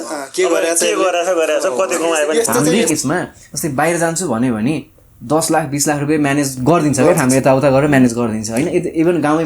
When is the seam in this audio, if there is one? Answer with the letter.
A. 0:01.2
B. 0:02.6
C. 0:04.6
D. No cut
B